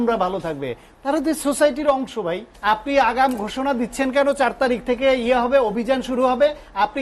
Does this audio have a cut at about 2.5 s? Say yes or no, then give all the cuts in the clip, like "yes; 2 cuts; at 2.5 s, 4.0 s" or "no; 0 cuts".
yes; 1 cut; at 2.5 s